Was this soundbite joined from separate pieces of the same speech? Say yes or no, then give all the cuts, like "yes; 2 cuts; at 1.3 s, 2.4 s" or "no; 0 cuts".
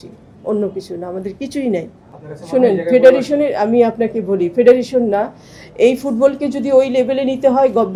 no; 0 cuts